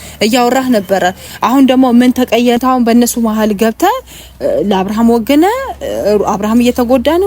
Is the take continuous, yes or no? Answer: no